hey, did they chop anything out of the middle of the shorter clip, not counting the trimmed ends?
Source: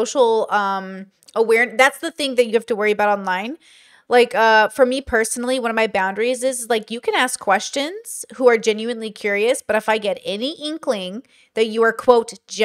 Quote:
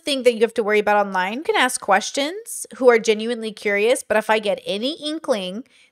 yes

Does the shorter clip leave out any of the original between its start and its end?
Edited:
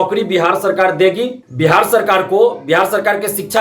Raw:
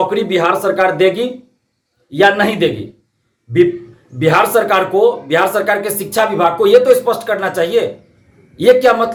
yes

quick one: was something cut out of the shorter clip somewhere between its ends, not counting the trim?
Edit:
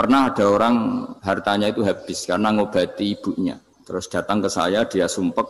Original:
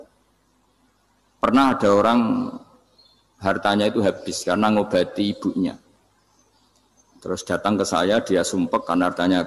yes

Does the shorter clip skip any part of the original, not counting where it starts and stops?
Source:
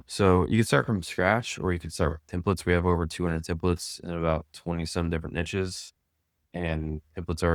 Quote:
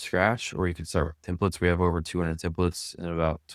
no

